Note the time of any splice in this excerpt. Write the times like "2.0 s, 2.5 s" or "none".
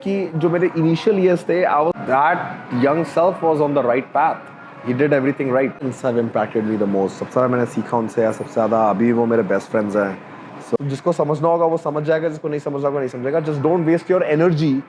2.0 s, 5.8 s, 10.8 s